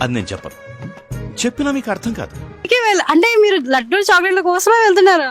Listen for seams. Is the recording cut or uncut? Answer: cut